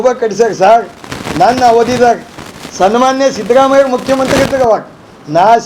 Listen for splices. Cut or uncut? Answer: uncut